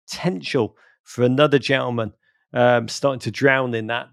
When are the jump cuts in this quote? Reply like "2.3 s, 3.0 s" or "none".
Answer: none